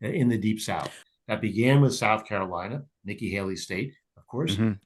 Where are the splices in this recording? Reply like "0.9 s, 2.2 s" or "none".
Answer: 1.0 s

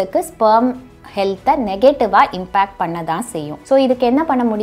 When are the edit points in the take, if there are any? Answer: 3.5 s

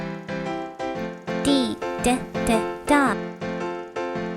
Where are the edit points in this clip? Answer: 0.9 s

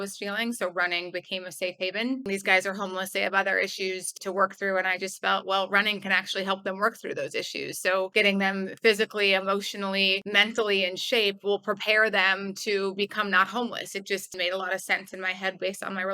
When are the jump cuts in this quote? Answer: 2.2 s, 4.1 s, 8.1 s, 10.2 s, 14.3 s

